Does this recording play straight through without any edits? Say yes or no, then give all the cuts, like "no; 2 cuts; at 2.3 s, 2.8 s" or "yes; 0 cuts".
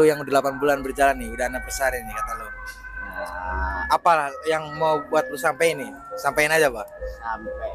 yes; 0 cuts